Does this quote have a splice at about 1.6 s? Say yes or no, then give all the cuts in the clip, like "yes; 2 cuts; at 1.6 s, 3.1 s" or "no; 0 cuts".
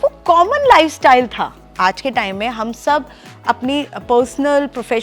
yes; 1 cut; at 1.6 s